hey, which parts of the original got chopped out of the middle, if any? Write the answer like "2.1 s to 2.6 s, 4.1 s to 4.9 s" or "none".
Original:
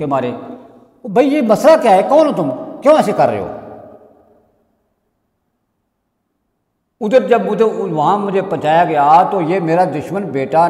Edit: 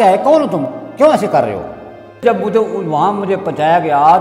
4.0 s to 7.2 s